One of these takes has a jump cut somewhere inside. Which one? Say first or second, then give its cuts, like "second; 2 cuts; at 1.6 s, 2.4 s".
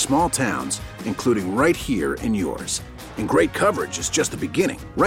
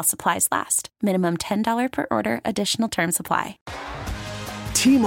second; 1 cut; at 3.6 s